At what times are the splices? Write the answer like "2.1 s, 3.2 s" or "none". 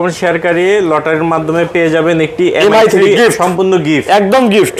none